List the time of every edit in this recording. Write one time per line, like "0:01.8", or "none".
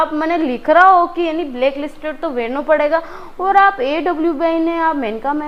none